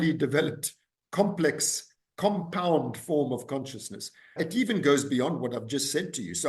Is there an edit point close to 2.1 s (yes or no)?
no